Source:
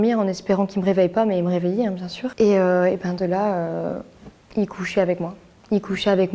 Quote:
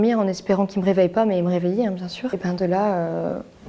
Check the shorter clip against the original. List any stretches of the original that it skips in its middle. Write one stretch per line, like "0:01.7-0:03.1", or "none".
0:02.3-0:02.9

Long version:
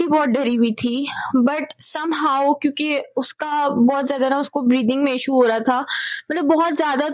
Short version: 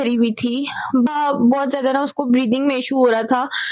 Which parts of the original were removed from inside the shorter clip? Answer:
0:01.5-0:03.5

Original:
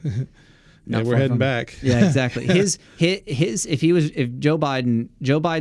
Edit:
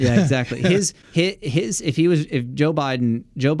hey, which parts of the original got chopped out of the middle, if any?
none

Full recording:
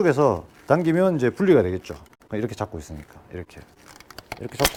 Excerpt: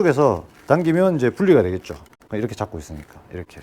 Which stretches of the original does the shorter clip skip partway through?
none

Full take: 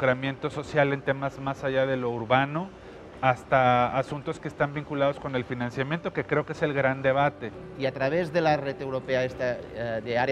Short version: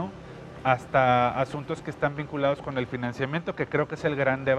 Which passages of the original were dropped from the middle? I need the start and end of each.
none

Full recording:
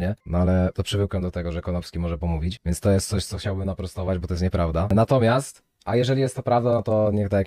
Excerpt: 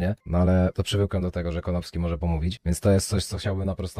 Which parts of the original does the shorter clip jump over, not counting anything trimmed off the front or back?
none

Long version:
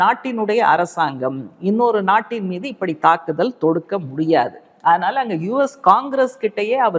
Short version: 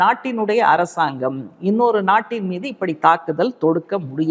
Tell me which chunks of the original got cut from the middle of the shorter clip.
none

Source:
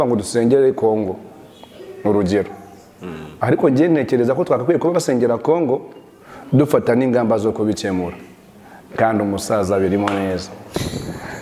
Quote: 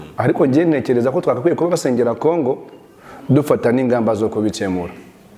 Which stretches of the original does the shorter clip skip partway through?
none

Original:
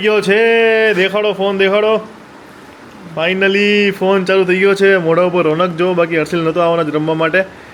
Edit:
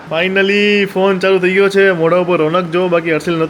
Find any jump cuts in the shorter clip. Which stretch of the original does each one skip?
none

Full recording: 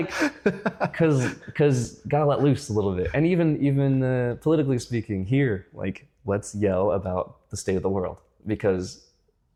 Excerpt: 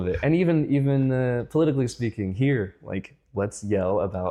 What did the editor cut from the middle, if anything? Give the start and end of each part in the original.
none

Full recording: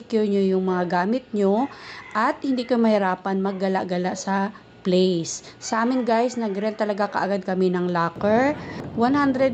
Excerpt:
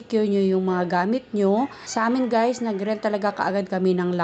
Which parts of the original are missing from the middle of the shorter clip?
0:01.8-0:05.6

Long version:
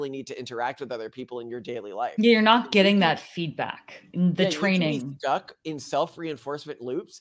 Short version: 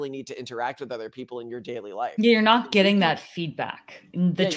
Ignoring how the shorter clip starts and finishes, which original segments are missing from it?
none

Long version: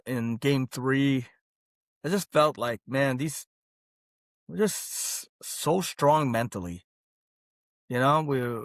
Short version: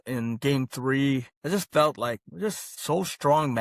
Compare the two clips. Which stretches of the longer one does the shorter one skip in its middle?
0:01.3-0:01.9
0:02.8-0:05.0

